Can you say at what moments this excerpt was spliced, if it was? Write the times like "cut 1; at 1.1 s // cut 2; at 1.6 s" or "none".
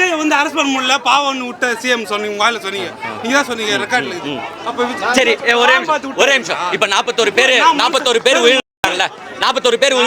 none

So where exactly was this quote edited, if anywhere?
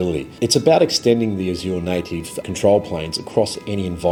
none

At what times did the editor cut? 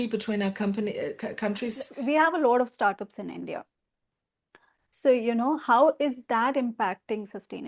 cut 1; at 1.9 s

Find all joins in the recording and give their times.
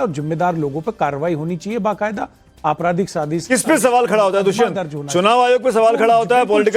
none

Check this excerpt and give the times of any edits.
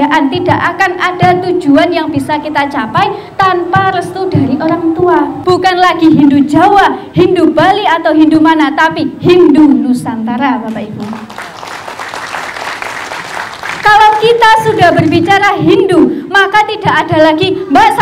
cut 1; at 5.4 s

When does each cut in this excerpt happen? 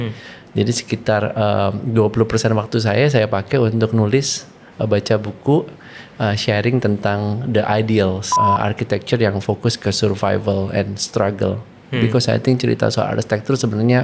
cut 1; at 8.3 s

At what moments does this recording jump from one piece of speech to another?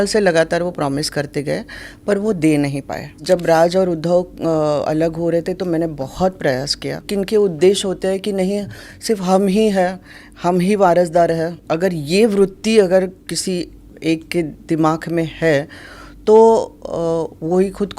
cut 1; at 3.2 s // cut 2; at 7.0 s // cut 3; at 11.6 s

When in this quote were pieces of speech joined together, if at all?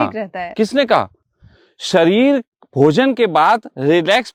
none

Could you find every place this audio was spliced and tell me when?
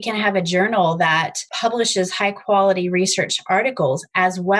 cut 1; at 1.4 s

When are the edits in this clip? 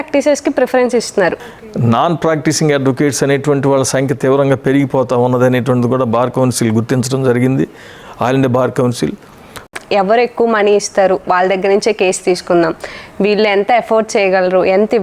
cut 1; at 1.5 s // cut 2; at 9.7 s

